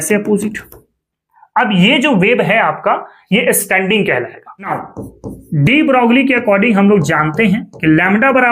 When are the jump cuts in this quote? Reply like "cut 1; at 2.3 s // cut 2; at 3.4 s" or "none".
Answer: cut 1; at 4.8 s